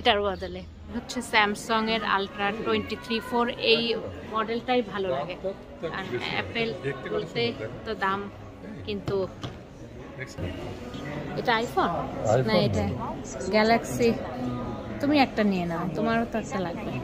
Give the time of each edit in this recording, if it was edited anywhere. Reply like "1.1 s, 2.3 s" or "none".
1.0 s